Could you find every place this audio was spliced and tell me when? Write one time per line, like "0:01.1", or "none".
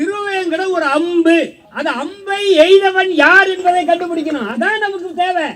0:01.6